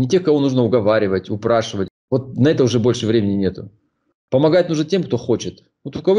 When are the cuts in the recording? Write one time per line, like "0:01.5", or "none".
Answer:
0:01.8